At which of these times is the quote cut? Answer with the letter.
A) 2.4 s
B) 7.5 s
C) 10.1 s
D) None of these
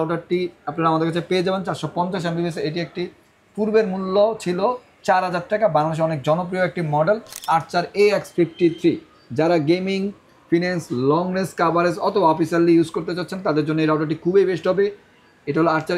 B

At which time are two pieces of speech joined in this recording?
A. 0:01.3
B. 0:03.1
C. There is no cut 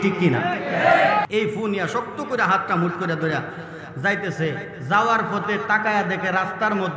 A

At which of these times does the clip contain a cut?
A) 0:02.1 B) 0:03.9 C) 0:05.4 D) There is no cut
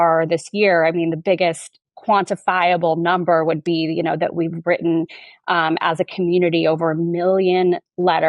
D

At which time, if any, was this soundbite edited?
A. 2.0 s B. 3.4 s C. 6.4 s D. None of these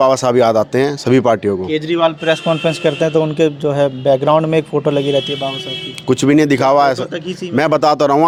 D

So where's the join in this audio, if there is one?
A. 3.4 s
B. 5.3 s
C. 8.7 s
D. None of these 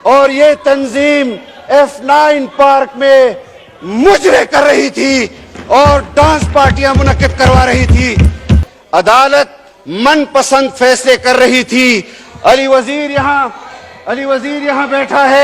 C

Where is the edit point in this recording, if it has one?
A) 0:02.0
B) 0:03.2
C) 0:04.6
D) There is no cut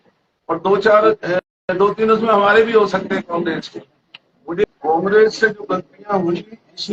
C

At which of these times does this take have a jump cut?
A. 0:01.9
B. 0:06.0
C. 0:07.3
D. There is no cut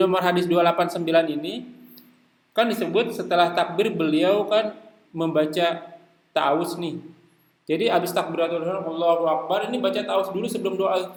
D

